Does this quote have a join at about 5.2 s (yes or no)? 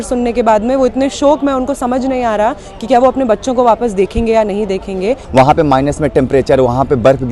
yes